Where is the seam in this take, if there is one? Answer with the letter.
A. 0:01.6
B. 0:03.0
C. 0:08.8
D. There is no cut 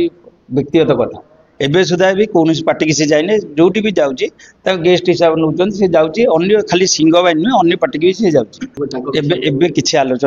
C